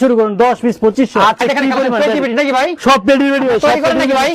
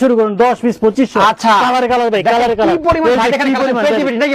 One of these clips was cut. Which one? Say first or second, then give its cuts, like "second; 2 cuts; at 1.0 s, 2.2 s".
first; 1 cut; at 1.4 s